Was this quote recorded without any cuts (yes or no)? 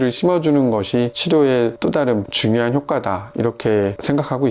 yes